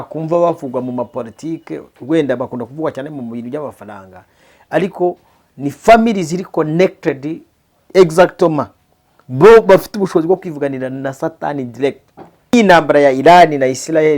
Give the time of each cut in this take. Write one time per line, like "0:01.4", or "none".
0:12.5